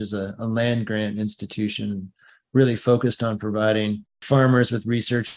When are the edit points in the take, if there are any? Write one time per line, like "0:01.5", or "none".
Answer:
0:04.1

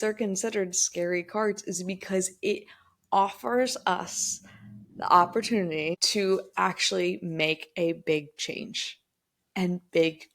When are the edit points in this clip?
0:06.0

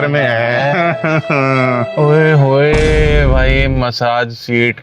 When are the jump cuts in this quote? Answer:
0:01.9

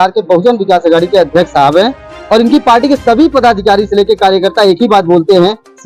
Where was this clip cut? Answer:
none

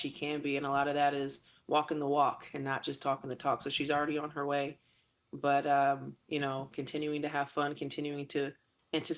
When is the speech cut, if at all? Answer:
0:04.0

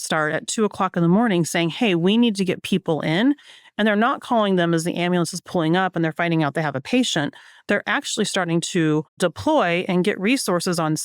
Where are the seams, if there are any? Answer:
0:09.2

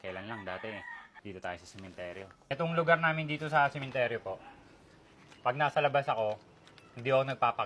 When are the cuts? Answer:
0:01.0
0:02.3

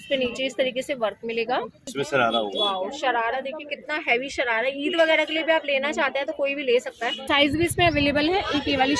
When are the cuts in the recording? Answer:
0:01.9
0:07.2

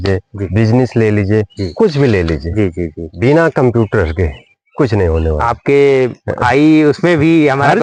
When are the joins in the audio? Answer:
none

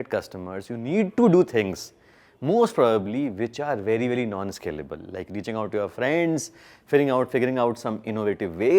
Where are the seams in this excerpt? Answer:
none

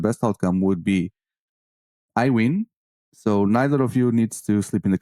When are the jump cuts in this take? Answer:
none

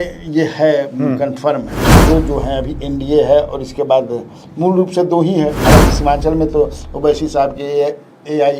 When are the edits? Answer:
0:02.0

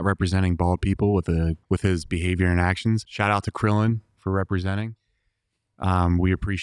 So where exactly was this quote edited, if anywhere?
0:01.6
0:03.1

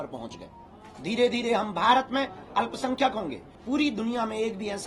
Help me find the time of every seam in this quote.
0:03.6

